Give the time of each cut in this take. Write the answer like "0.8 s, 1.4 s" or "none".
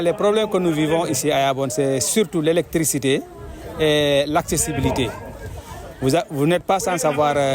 none